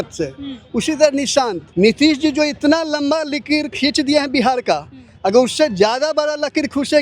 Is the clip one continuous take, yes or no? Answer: no